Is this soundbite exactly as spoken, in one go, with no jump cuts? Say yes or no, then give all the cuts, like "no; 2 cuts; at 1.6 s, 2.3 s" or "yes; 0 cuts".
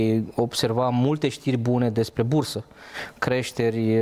yes; 0 cuts